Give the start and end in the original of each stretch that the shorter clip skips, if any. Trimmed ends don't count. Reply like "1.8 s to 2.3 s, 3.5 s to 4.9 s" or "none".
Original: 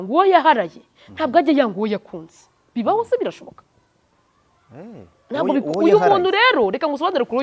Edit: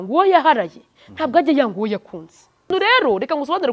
2.7 s to 6.2 s